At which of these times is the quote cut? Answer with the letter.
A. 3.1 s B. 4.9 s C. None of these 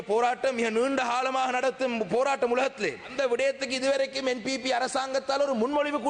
A